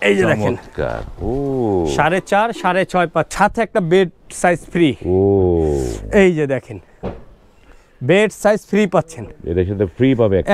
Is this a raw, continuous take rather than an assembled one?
no; 1 cut; at 3.3 s

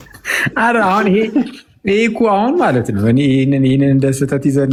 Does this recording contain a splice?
no; 0 cuts

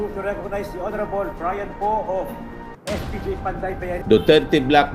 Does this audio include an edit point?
yes; 1 cut; at 4.0 s

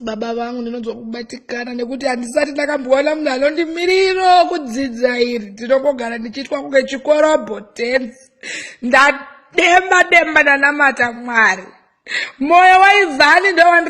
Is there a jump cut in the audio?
no; 0 cuts

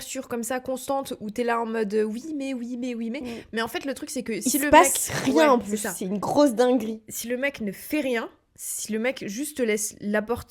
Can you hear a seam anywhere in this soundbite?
no; 0 cuts

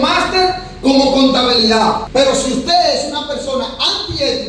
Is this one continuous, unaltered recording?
no; 1 cut; at 2.0 s

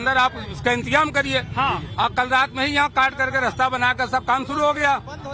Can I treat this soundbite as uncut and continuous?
no; 1 cut; at 1.6 s

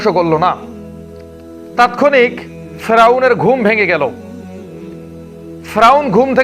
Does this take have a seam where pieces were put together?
yes; 2 cuts; at 4.1 s, 5.7 s

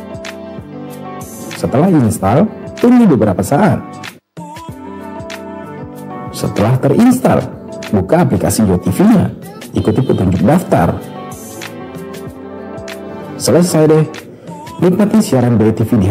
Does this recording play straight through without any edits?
yes; 0 cuts

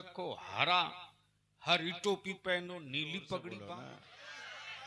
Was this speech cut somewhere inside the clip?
yes; 1 cut; at 3.8 s

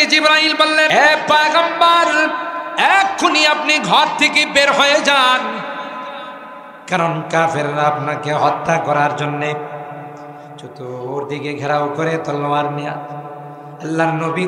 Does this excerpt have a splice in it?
yes; 1 cut; at 0.9 s

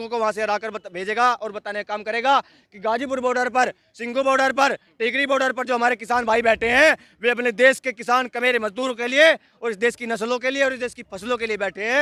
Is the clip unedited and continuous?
yes; 0 cuts

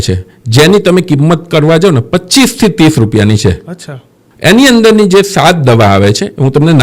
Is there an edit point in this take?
no; 0 cuts

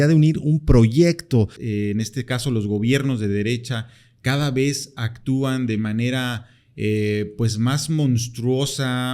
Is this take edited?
yes; 1 cut; at 1.6 s

